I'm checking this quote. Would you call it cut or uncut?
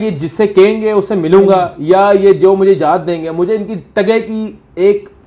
uncut